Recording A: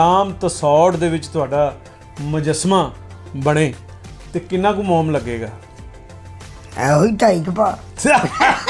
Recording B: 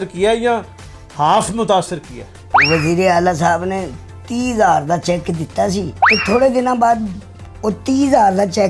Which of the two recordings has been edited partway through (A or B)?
B